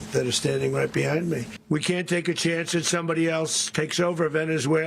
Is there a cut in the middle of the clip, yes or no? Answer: yes